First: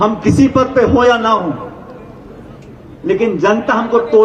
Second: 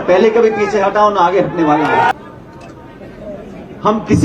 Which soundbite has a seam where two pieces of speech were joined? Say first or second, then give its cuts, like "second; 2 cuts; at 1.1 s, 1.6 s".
second; 1 cut; at 2.1 s